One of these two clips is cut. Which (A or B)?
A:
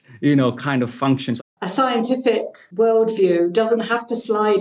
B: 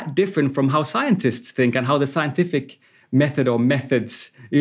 A